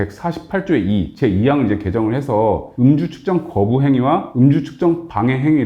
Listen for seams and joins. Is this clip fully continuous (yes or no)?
no